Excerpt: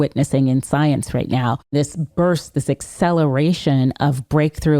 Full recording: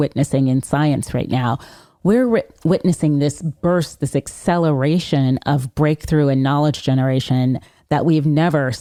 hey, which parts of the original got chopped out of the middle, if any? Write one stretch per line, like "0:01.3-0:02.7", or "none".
0:01.7-0:03.2